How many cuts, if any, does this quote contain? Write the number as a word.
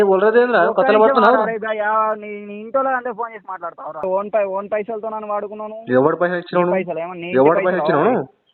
one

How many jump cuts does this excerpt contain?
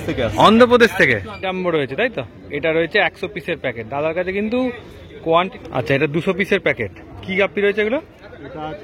two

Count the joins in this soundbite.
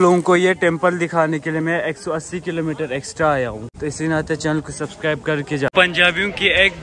two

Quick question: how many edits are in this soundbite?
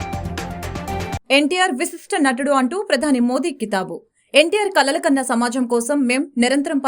one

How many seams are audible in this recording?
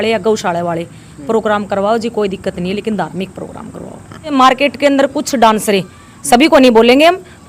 one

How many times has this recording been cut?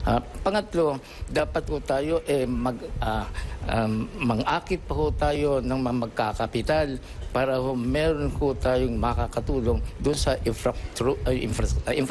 one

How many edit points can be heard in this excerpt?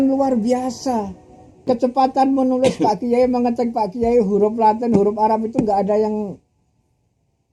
one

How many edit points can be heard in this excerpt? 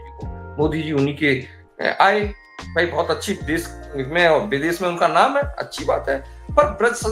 zero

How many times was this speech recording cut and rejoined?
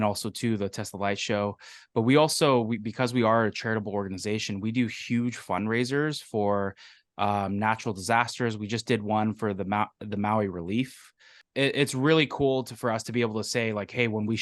one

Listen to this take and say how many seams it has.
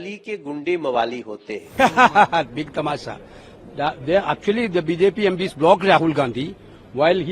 one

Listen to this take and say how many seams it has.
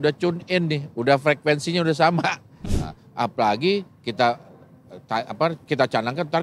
one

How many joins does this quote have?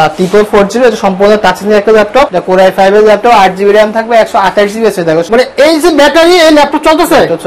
two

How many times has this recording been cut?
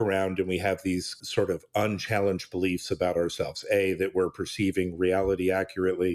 one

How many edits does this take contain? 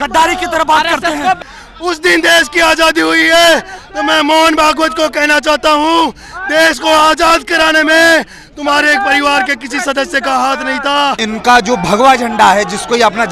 two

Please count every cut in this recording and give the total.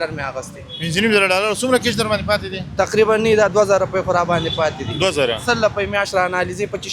zero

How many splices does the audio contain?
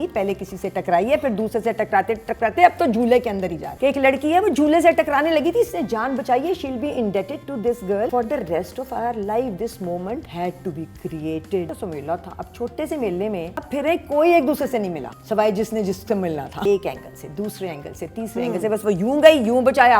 seven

